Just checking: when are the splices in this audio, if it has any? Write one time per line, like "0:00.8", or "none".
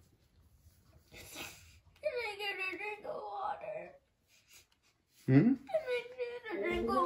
none